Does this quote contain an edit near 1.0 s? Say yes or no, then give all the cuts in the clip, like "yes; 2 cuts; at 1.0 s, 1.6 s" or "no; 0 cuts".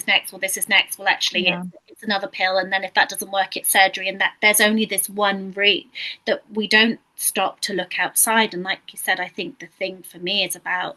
no; 0 cuts